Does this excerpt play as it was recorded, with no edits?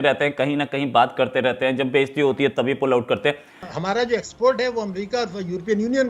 no; 1 cut; at 3.7 s

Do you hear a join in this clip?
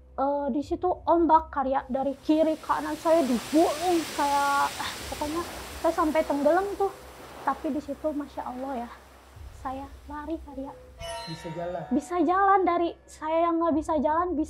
no; 0 cuts

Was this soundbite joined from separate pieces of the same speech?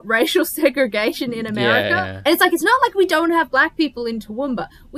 yes; 1 cut; at 2.1 s

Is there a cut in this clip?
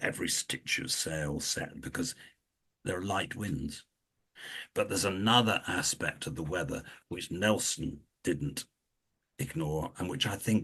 no; 0 cuts

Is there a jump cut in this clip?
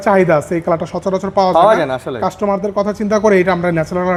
no; 0 cuts

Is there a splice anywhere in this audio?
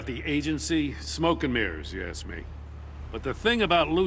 yes; 1 cut; at 3.1 s

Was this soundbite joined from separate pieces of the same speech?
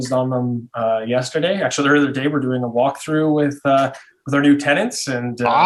no; 0 cuts

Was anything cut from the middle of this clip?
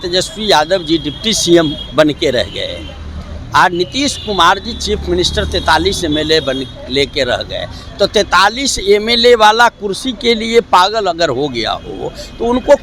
no; 0 cuts

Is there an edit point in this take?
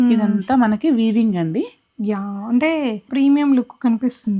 yes; 1 cut; at 3.1 s

